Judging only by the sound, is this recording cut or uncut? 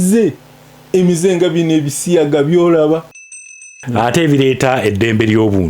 cut